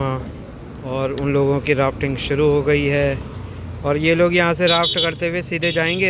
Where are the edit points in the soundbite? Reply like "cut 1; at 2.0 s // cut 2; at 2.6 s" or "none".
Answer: none